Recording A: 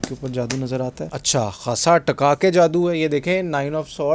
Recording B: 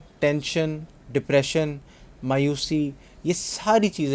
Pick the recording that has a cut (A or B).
A